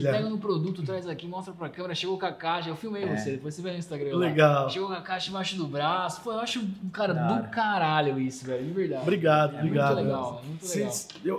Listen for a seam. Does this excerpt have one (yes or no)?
no